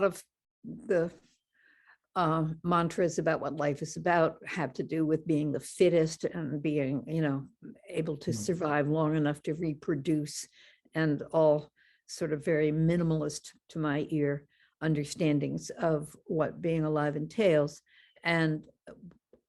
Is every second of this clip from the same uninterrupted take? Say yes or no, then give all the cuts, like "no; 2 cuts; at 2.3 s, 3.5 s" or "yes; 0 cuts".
yes; 0 cuts